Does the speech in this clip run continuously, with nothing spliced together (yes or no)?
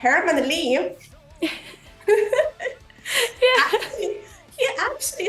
yes